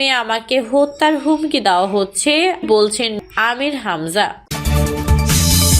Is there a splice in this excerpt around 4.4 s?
yes; 1 cut; at 4.4 s

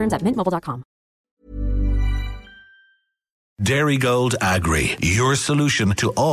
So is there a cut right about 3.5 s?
yes; 2 cuts; at 1.2 s, 3.5 s

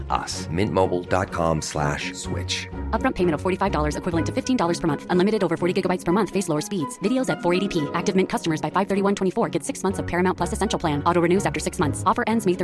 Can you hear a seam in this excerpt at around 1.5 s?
no; 0 cuts

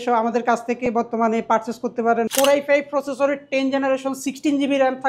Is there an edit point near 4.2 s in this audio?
no; 1 cut; at 2.3 s

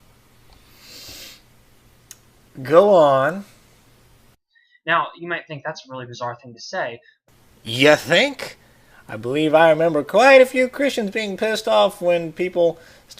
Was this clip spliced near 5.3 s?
yes; 1 cut; at 5.3 s

